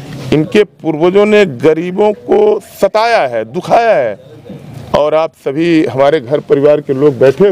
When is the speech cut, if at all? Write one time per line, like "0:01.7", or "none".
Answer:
none